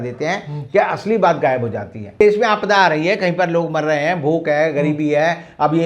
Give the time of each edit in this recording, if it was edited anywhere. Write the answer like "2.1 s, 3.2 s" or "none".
2.2 s